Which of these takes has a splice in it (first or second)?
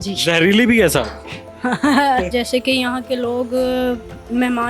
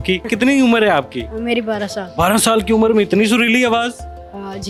first